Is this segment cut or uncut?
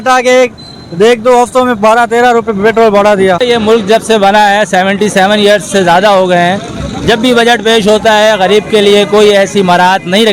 cut